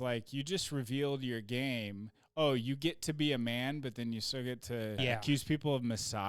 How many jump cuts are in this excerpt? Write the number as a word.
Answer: one